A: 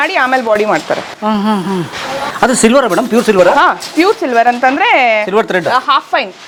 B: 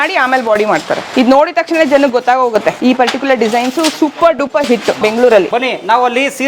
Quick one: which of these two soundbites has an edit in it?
B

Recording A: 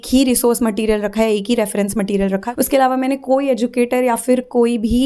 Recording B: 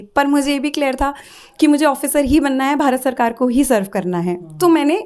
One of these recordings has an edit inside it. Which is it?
A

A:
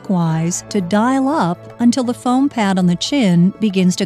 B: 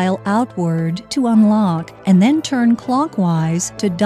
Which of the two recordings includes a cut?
B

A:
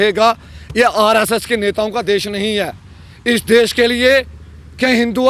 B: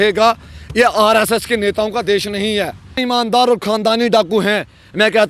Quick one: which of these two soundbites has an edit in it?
B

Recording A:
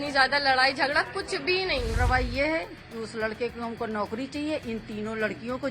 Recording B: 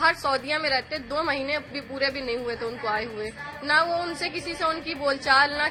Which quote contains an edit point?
A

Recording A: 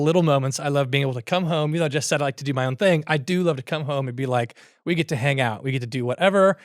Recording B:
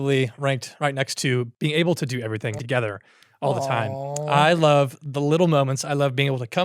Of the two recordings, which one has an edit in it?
B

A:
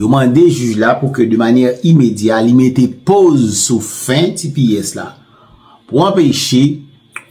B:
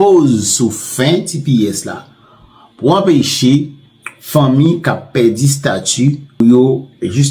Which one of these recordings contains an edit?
B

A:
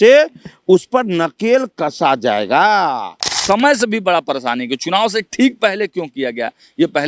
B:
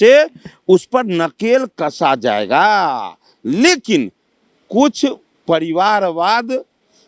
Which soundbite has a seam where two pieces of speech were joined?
A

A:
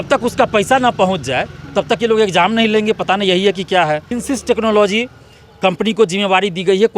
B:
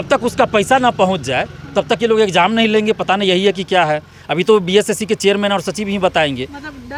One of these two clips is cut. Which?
A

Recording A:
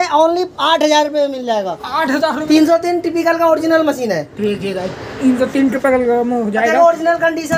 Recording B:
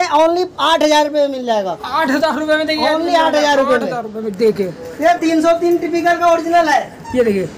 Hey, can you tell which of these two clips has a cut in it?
A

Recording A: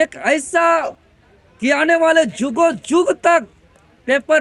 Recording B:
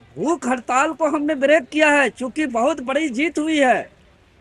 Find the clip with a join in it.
A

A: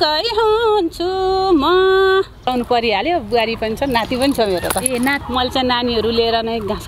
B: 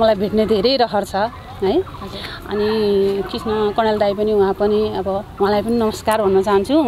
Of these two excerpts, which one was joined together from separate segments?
A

